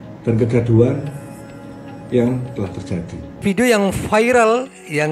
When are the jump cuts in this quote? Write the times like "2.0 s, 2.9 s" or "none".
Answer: 3.4 s